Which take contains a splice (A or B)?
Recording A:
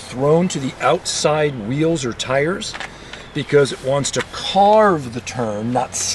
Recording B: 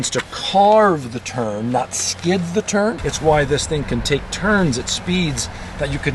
B